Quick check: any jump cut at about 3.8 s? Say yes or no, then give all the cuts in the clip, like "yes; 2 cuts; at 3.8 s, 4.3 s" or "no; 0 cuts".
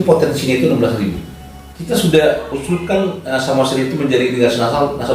no; 1 cut; at 1.7 s